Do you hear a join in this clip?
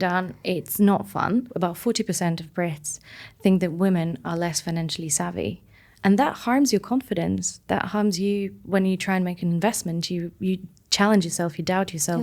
yes; 2 cuts; at 1.5 s, 9.4 s

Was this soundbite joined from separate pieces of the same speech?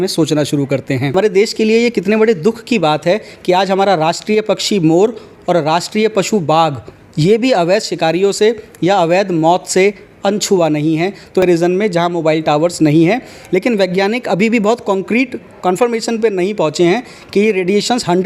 yes; 2 cuts; at 1.1 s, 11.4 s

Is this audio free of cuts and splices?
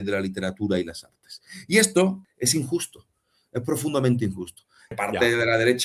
no; 2 cuts; at 2.2 s, 4.8 s

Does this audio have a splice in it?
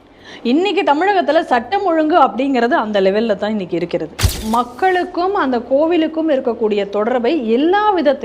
yes; 1 cut; at 4.3 s

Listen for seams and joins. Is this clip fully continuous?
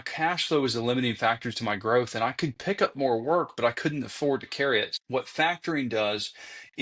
no; 1 cut; at 4.9 s

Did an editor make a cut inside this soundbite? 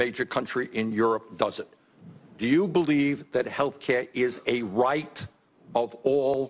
no; 0 cuts

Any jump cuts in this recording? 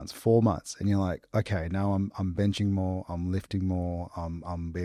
no; 0 cuts

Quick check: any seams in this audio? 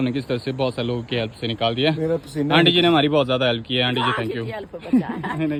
no; 0 cuts

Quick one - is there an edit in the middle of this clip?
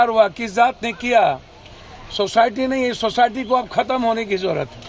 no; 0 cuts

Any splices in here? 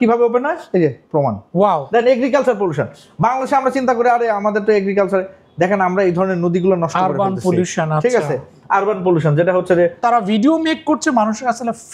yes; 2 cuts; at 1.8 s, 10.0 s

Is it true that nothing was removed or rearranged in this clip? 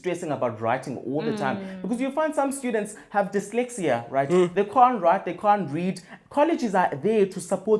yes; 0 cuts

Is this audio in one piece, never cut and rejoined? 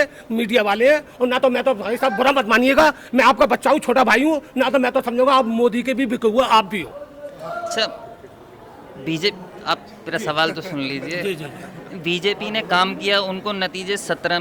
yes; 0 cuts

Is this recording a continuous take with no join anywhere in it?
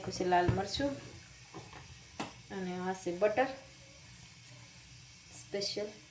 yes; 0 cuts

